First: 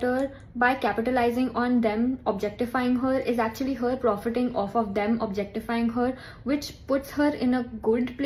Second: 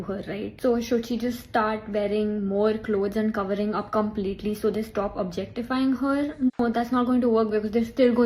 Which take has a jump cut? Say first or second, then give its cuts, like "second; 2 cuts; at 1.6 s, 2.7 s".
second; 2 cuts; at 1.0 s, 6.6 s